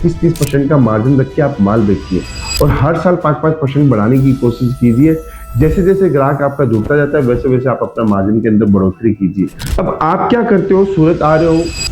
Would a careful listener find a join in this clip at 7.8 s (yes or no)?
no